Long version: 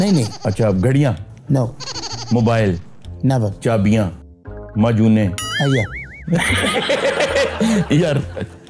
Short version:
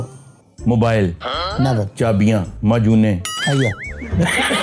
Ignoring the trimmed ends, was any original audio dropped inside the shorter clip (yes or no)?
yes